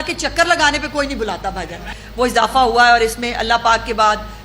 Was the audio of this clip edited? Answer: yes; 1 cut; at 1.9 s

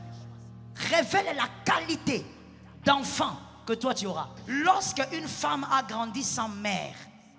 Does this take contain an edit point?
yes; 1 cut; at 4.3 s

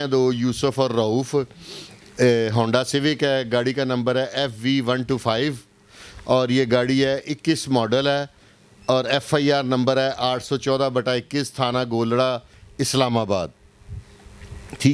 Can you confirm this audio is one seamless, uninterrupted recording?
yes; 0 cuts

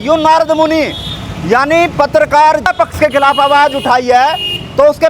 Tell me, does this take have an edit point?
yes; 1 cut; at 2.7 s

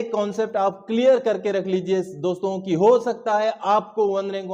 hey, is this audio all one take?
yes; 0 cuts

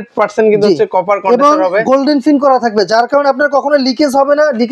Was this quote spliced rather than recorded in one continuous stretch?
no; 0 cuts

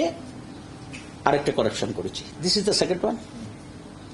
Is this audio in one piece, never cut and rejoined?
yes; 0 cuts

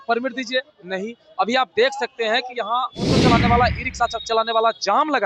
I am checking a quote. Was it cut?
yes; 1 cut; at 3.1 s

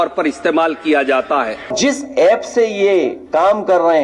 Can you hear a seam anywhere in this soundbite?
yes; 1 cut; at 1.6 s

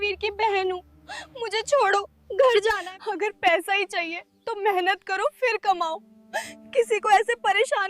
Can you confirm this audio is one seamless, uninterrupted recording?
no; 1 cut; at 2.9 s

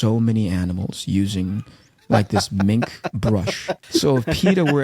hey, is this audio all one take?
no; 1 cut; at 3.7 s

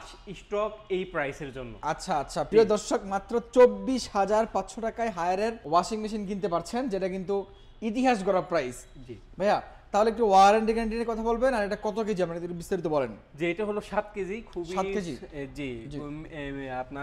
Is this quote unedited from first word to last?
yes; 0 cuts

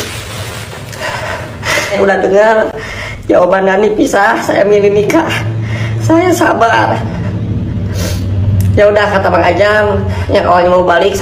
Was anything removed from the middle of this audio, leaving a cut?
yes; 1 cut; at 1.9 s

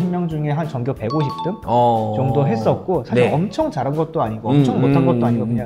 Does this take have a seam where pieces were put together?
no; 0 cuts

